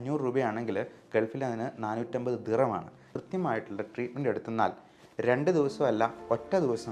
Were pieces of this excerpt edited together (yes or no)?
yes